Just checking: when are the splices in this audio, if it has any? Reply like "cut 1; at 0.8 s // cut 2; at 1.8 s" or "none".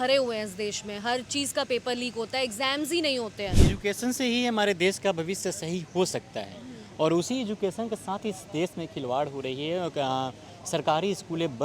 cut 1; at 3.6 s